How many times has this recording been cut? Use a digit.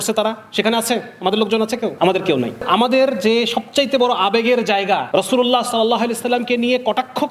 3